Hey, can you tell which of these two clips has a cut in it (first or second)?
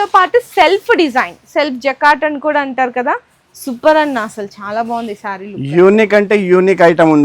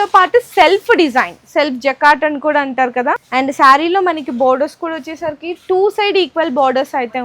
second